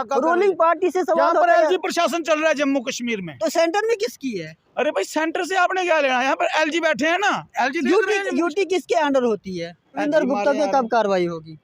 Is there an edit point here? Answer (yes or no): yes